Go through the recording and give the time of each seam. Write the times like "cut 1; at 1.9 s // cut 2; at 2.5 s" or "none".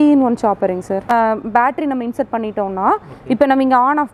cut 1; at 1.1 s